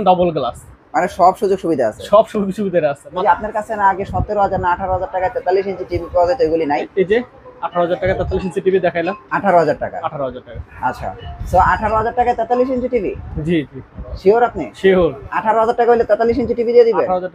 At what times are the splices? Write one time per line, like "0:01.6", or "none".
0:03.2